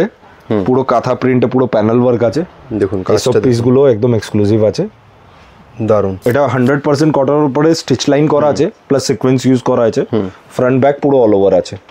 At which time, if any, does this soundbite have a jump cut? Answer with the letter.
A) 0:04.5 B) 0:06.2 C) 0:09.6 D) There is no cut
B